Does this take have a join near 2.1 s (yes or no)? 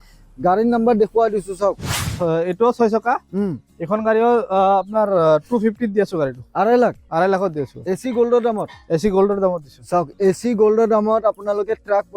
yes